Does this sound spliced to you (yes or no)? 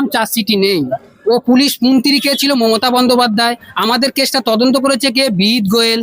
yes